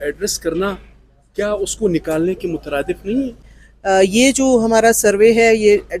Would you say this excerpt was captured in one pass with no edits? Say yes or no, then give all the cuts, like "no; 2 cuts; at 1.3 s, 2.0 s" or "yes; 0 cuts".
no; 1 cut; at 3.4 s